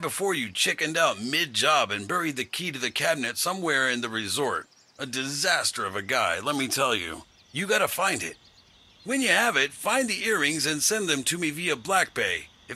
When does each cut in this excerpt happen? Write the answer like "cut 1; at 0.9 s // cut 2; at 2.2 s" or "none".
cut 1; at 11.3 s

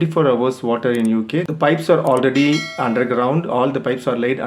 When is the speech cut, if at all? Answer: cut 1; at 1.5 s

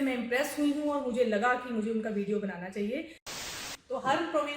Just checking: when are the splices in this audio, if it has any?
cut 1; at 3.4 s

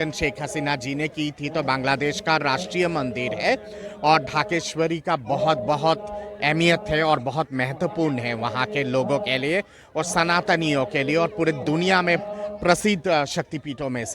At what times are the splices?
none

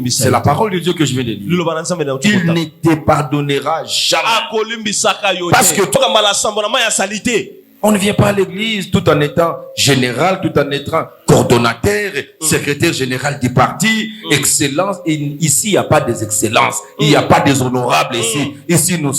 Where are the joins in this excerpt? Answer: cut 1; at 6.0 s

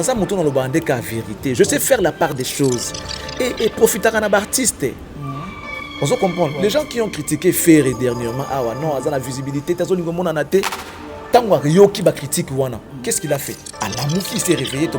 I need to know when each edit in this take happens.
none

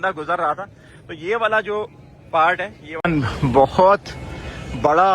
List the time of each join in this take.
cut 1; at 2.8 s

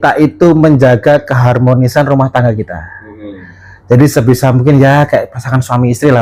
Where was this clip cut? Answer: none

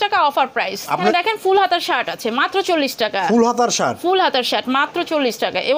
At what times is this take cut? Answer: cut 1; at 1.1 s

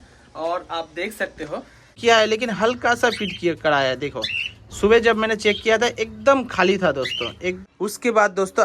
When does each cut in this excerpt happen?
cut 1; at 2.0 s // cut 2; at 7.6 s

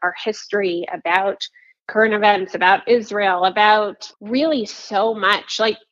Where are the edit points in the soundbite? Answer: cut 1; at 4.1 s

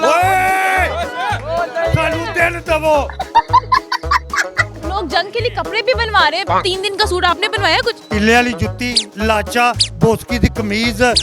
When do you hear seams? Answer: cut 1; at 4.6 s

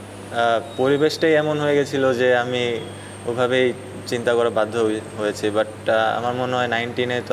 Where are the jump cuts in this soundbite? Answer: none

